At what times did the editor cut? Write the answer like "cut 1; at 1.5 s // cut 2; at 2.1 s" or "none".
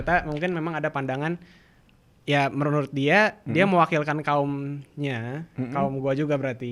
none